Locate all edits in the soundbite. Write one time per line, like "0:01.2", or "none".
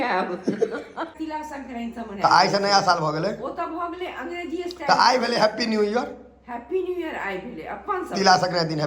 0:01.1